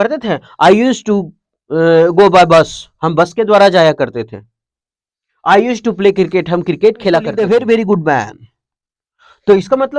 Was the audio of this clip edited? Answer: yes; 1 cut; at 7.3 s

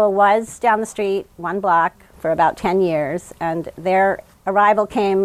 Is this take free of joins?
yes; 0 cuts

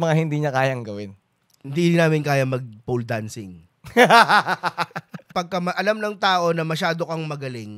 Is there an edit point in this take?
yes; 1 cut; at 5.3 s

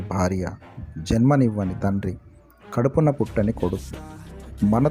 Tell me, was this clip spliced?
no; 0 cuts

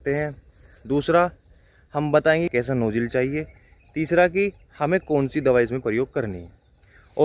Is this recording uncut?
no; 1 cut; at 2.5 s

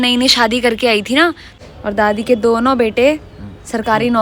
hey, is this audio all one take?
no; 1 cut; at 1.5 s

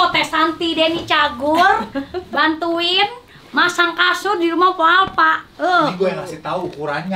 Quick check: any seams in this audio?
no; 0 cuts

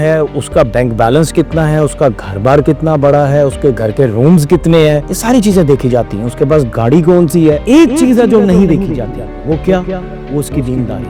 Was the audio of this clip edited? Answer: no; 0 cuts

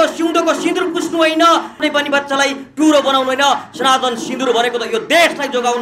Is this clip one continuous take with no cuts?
no; 1 cut; at 1.8 s

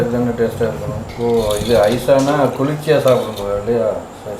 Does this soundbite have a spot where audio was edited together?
yes; 1 cut; at 1.0 s

